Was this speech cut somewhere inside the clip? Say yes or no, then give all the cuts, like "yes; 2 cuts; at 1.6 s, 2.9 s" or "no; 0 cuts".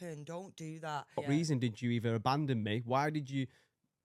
yes; 1 cut; at 1.2 s